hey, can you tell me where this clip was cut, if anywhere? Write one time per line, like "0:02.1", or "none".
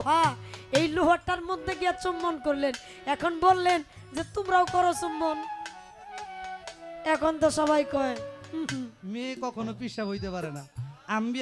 0:09.0